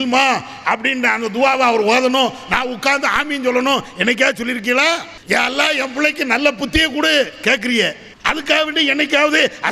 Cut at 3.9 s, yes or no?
no